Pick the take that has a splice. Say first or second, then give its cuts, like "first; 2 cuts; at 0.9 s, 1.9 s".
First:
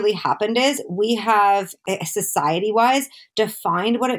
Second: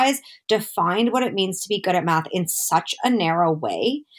first; 1 cut; at 1.7 s